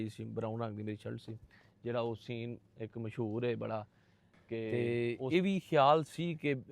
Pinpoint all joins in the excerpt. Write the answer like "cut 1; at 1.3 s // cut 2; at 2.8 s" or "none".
cut 1; at 4.7 s